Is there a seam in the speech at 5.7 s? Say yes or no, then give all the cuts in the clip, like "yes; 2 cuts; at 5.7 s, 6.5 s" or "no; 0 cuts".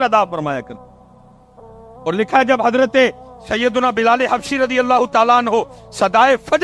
no; 0 cuts